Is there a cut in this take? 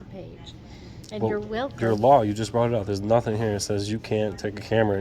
no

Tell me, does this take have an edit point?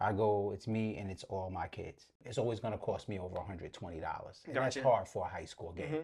yes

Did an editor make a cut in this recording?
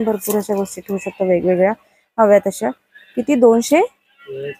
no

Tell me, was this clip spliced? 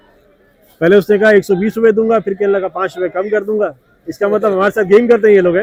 no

